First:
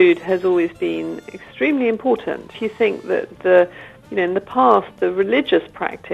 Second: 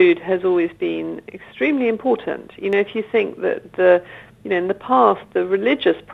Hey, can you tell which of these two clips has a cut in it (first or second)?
first